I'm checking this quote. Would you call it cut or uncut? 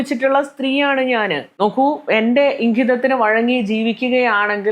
cut